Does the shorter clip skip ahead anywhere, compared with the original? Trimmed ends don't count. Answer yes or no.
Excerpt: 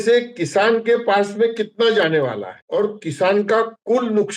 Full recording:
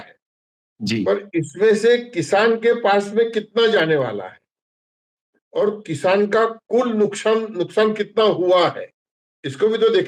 yes